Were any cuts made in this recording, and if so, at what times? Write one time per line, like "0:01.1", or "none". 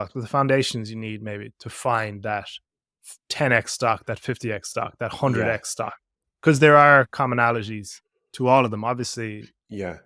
none